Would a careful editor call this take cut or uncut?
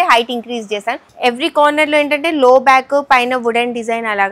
cut